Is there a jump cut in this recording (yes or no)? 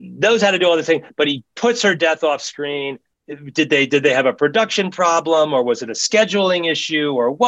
no